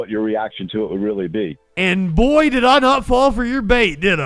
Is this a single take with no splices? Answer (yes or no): yes